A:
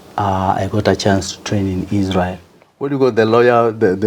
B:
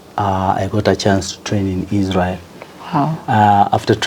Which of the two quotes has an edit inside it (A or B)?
A